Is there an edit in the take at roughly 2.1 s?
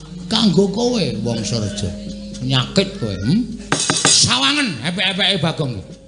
no; 1 cut; at 3.6 s

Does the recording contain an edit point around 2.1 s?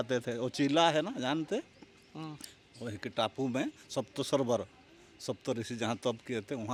no; 0 cuts

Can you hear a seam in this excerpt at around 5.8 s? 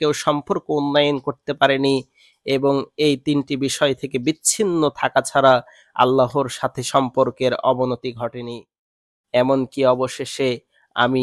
no; 1 cut; at 8.9 s

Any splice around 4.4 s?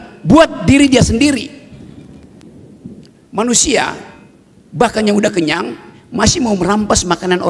no; 0 cuts

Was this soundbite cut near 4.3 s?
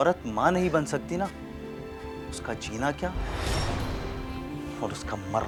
no; 0 cuts

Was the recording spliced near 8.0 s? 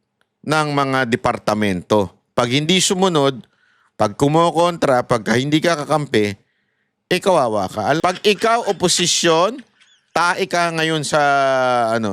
yes; 1 cut; at 8.0 s

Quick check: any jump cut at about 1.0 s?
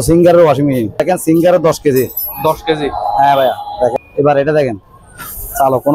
yes; 2 cuts; at 1.0 s, 4.0 s

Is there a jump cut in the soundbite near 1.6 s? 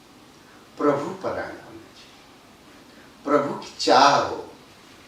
no; 0 cuts

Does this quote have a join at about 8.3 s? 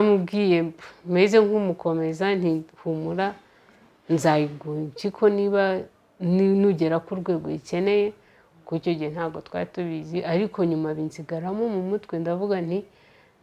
no; 0 cuts

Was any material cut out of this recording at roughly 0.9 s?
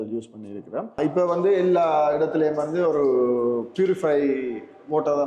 yes; 1 cut; at 0.9 s

